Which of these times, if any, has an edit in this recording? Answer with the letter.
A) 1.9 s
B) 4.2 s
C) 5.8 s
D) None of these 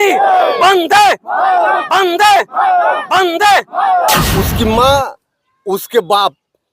B